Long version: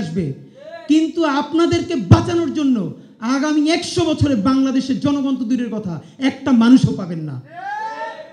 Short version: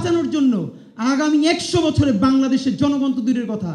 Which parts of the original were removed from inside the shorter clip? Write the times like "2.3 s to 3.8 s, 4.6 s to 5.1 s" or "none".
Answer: none